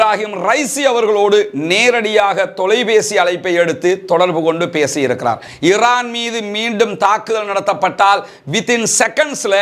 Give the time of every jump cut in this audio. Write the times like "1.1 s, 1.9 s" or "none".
5.5 s